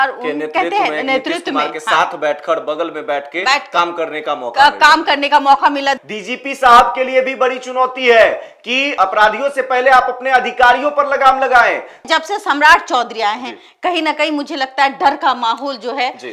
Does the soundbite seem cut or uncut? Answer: cut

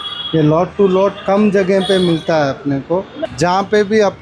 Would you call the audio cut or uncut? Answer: cut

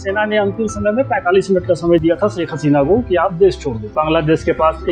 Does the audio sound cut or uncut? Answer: cut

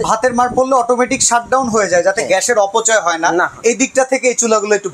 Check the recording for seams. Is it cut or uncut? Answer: uncut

